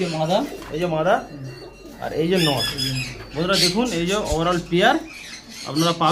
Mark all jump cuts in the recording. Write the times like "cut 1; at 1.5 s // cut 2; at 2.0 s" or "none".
none